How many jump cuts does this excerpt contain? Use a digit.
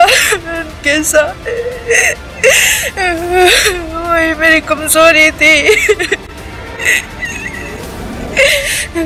0